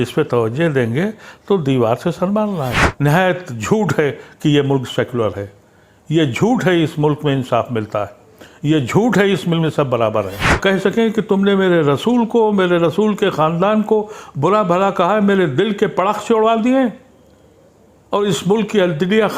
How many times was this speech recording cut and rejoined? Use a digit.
2